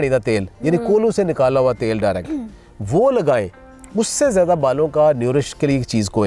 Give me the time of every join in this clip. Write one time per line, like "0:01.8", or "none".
none

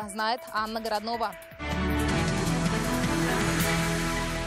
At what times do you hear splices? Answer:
0:01.5

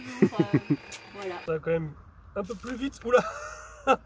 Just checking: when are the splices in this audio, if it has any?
0:01.3

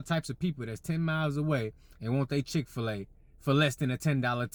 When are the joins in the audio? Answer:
none

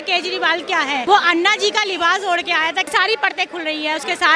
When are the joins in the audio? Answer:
0:01.0
0:02.9

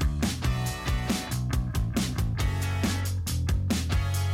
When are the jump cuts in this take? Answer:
0:01.7

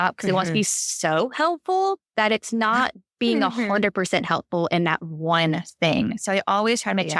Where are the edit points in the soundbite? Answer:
none

